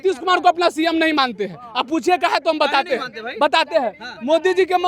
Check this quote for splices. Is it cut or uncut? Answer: uncut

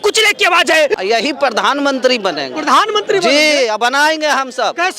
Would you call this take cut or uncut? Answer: cut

